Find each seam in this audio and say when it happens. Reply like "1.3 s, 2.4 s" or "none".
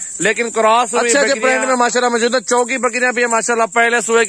1.1 s